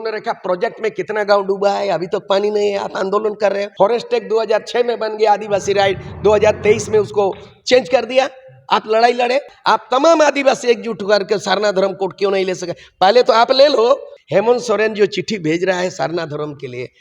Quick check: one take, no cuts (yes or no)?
no